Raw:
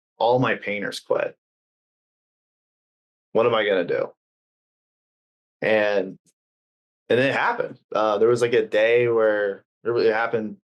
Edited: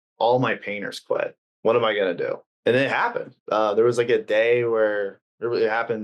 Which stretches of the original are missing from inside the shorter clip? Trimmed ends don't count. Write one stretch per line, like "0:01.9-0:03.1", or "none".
0:01.4-0:03.1
0:04.2-0:06.9